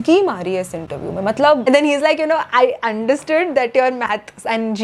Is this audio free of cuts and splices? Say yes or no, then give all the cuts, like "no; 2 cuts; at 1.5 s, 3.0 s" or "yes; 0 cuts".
no; 1 cut; at 1.6 s